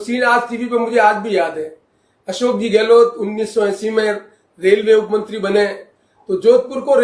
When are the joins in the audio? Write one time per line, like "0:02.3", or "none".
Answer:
none

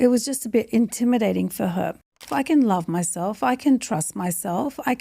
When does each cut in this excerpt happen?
0:02.0

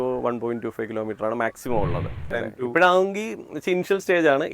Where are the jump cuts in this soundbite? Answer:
0:02.3

